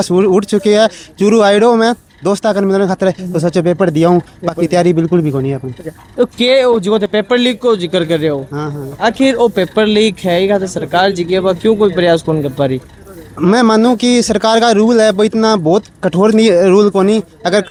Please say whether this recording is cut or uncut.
uncut